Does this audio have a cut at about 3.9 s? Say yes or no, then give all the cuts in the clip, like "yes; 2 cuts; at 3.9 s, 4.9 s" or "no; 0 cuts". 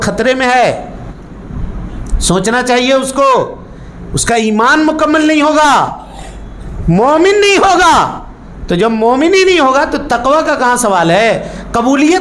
no; 0 cuts